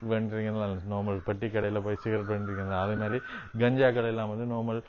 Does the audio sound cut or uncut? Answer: uncut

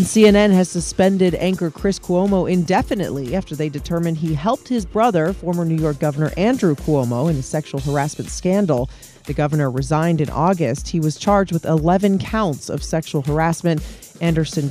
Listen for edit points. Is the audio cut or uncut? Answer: uncut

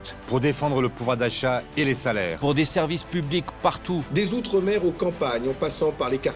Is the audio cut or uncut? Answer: uncut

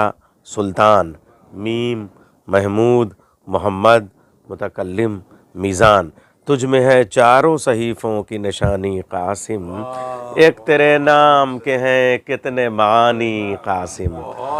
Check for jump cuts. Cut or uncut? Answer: uncut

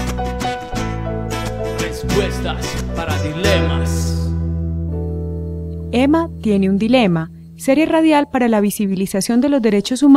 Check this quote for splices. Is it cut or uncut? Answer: cut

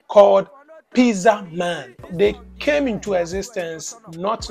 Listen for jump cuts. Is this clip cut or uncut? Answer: cut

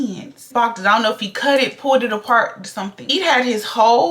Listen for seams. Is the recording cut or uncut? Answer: cut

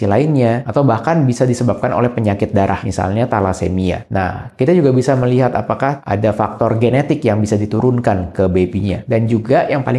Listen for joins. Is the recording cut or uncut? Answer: cut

